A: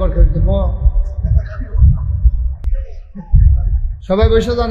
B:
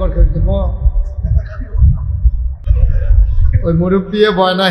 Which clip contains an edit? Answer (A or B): B